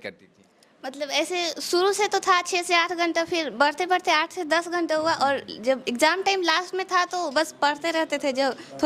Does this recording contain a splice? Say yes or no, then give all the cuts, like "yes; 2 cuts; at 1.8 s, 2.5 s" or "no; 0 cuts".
no; 0 cuts